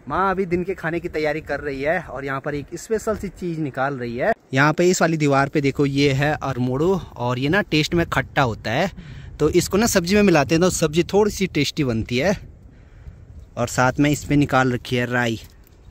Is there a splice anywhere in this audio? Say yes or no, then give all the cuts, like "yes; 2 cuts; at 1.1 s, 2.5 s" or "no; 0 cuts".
no; 0 cuts